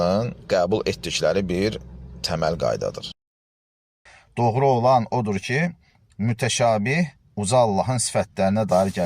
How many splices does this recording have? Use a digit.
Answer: 1